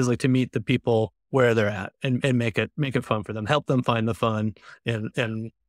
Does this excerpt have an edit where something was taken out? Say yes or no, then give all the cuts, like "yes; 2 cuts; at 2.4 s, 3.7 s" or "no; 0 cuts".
no; 0 cuts